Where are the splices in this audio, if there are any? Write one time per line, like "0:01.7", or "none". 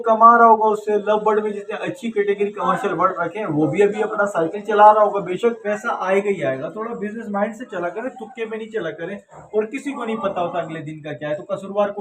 0:05.6